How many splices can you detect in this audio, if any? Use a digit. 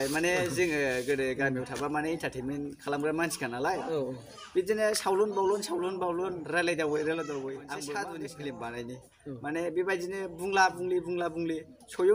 1